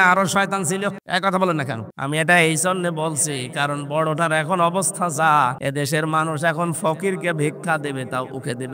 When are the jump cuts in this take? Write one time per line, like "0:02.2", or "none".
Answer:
0:01.0
0:01.9
0:05.6